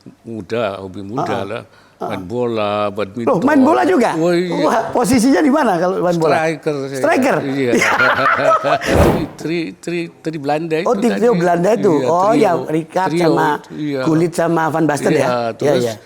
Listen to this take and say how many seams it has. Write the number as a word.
one